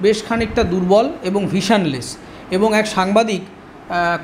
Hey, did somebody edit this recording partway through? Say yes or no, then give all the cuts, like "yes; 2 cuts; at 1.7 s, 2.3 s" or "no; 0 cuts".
no; 0 cuts